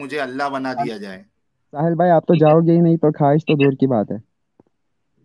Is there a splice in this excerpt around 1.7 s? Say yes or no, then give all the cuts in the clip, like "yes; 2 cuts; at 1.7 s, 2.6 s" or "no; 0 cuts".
yes; 1 cut; at 1.7 s